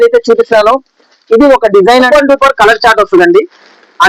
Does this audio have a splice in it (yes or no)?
yes